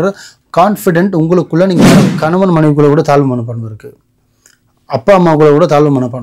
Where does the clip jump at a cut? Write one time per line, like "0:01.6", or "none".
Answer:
0:02.1